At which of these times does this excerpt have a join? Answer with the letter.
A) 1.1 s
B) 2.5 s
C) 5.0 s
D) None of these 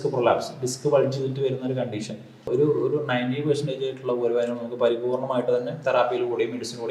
B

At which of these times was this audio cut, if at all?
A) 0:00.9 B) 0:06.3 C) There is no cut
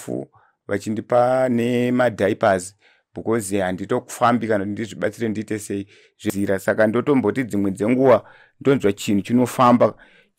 B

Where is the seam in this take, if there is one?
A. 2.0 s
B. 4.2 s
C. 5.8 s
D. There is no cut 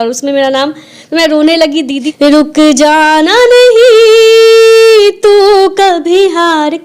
A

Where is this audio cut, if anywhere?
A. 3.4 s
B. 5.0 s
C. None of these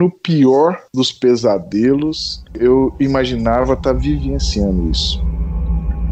B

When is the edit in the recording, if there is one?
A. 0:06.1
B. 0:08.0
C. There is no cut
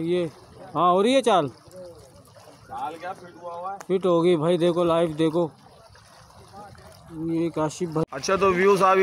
B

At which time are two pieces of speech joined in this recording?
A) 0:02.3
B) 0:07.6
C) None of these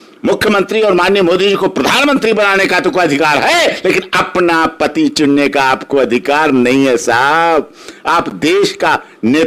C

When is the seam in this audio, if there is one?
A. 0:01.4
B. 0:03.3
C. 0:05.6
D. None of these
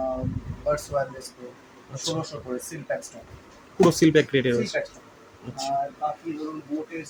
D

